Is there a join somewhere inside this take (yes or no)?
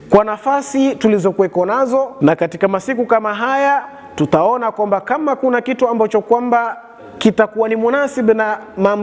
yes